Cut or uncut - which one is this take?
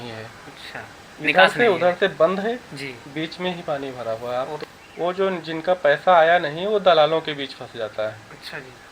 cut